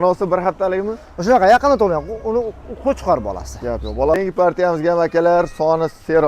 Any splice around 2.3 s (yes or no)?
no